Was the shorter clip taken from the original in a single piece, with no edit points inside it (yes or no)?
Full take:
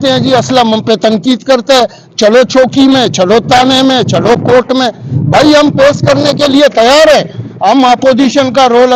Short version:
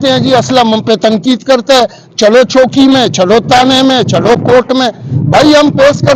yes